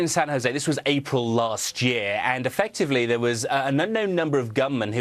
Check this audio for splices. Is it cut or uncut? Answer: uncut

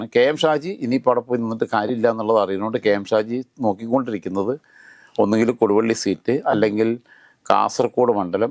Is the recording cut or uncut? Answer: uncut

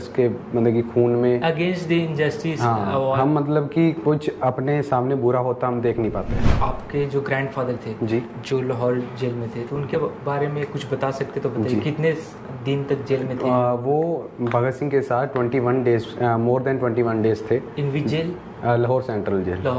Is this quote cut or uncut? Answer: cut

